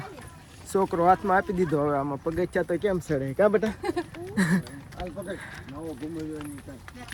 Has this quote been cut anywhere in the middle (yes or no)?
no